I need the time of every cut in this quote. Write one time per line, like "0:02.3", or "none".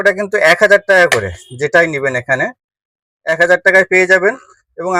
none